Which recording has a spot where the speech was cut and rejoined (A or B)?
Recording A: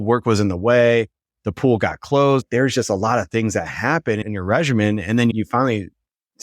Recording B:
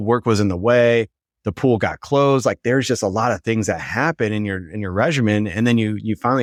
A